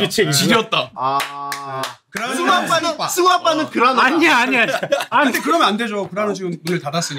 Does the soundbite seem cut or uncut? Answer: cut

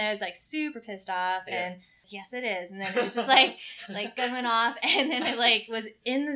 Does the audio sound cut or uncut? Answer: cut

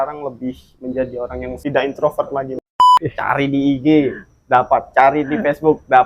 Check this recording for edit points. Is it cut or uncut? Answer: cut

